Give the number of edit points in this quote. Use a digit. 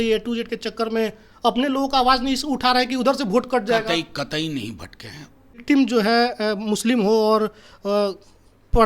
1